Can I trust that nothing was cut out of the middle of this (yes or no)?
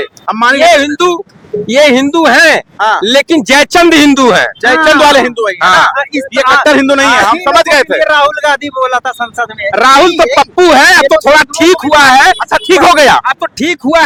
yes